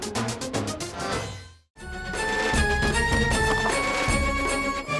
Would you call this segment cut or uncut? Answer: cut